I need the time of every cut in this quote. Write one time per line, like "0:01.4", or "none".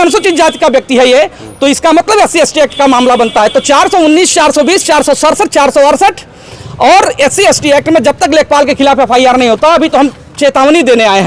none